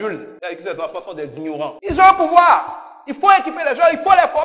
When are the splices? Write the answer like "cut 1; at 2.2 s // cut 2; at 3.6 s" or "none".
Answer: cut 1; at 1.7 s